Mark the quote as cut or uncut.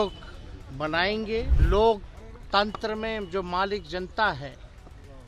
cut